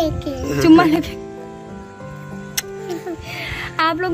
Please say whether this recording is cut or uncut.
uncut